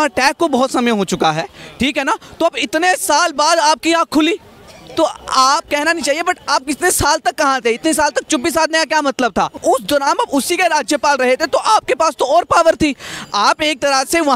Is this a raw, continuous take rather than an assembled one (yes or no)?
no